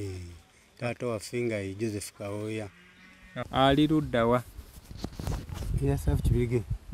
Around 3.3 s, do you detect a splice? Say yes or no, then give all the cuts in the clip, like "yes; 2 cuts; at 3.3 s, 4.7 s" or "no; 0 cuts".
yes; 1 cut; at 3.3 s